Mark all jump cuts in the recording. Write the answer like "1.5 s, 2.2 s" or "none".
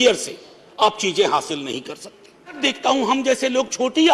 2.6 s